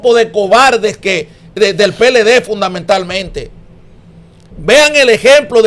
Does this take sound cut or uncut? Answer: uncut